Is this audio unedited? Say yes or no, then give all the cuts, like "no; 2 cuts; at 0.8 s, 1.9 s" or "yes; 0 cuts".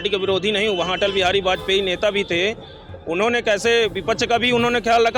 yes; 0 cuts